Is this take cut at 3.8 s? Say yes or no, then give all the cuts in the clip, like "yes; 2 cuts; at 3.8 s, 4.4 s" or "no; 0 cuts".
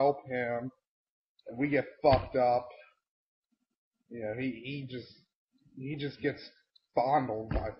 yes; 1 cut; at 3.8 s